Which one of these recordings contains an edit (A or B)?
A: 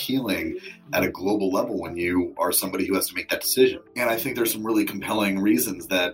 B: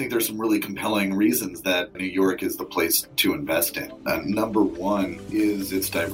B